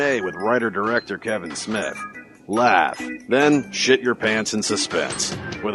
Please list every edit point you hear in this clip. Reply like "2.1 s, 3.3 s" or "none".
1.4 s